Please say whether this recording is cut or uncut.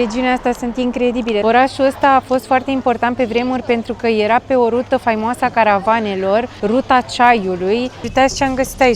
cut